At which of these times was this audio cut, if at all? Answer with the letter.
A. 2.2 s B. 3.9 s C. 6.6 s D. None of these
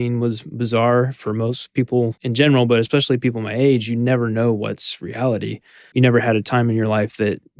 A